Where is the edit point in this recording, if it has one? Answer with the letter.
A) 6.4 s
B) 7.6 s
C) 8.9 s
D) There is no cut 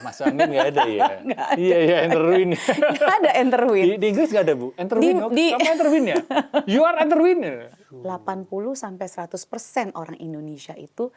B